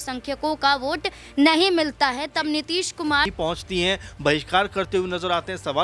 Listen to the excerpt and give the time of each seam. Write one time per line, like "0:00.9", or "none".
0:03.3